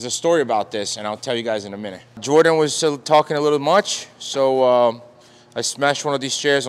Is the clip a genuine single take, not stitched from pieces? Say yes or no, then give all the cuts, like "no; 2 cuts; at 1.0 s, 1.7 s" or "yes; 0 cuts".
no; 1 cut; at 2.2 s